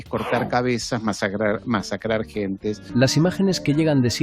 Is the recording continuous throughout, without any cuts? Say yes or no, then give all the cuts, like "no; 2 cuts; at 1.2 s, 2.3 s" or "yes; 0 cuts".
no; 1 cut; at 2.8 s